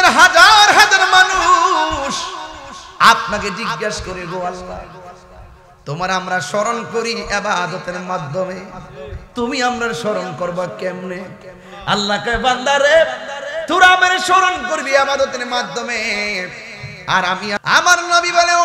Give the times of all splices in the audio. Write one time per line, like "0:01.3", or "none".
0:17.6